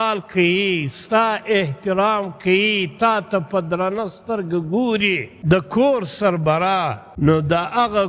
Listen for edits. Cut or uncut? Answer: cut